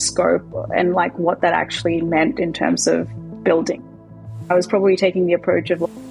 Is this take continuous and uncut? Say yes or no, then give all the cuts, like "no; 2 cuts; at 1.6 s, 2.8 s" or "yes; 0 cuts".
yes; 0 cuts